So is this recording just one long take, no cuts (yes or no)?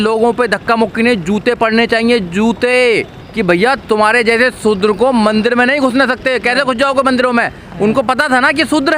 yes